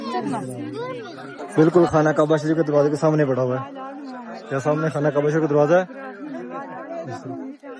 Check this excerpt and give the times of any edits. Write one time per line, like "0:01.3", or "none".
0:01.4